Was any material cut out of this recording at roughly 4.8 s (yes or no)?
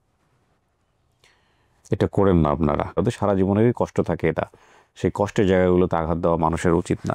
no